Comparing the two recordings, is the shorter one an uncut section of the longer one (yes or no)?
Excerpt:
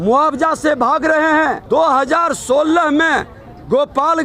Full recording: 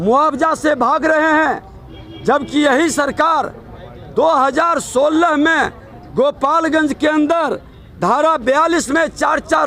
no